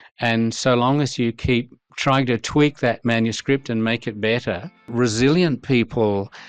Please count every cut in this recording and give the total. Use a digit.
2